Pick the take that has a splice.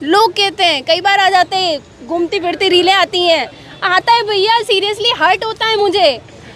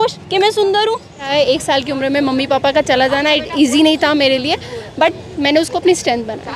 second; 1 cut; at 1.3 s

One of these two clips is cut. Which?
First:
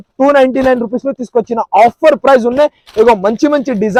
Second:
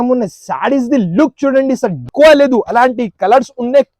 second; 1 cut; at 2.1 s

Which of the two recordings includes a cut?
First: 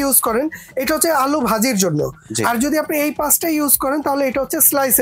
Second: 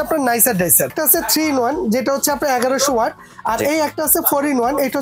second; 1 cut; at 0.9 s

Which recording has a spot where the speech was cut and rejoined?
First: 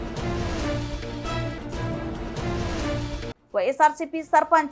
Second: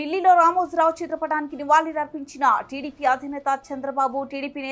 first; 1 cut; at 3.3 s

